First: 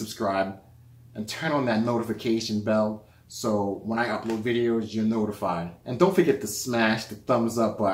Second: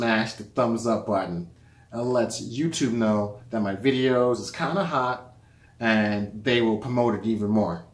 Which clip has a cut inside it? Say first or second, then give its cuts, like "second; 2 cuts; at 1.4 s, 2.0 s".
first; 1 cut; at 5.8 s